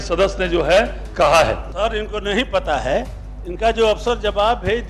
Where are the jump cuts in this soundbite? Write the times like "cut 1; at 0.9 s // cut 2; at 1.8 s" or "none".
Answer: cut 1; at 1.7 s